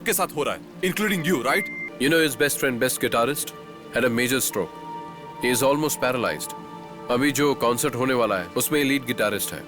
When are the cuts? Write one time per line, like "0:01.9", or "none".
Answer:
0:01.8

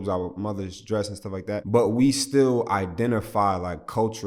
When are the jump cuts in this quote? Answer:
0:01.7

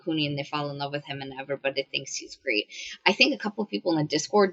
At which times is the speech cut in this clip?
none

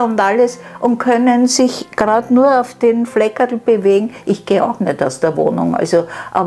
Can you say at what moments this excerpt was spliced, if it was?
none

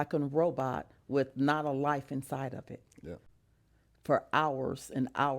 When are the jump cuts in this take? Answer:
0:03.3

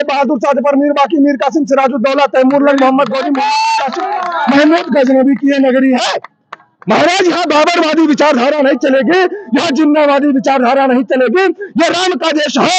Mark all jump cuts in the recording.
none

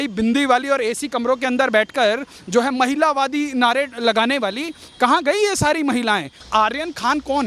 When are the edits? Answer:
0:06.4

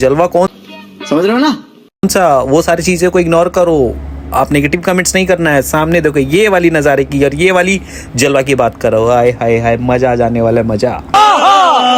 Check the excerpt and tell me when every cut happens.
none

